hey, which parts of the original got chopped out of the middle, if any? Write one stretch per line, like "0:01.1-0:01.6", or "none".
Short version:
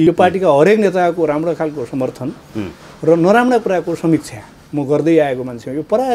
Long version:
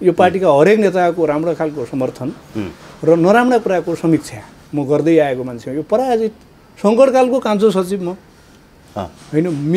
none